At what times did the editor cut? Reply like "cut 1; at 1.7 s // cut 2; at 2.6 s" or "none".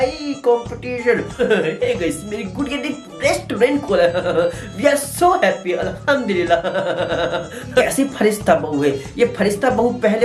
cut 1; at 1.3 s // cut 2; at 7.8 s